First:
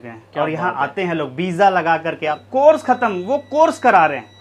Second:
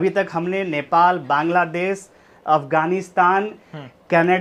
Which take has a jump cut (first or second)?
first